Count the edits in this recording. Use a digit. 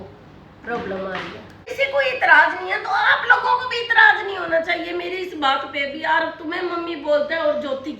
1